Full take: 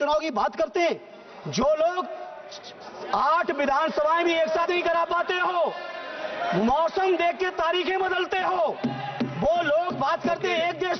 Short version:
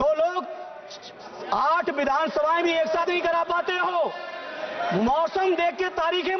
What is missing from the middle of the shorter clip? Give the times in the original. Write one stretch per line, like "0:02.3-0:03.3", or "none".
none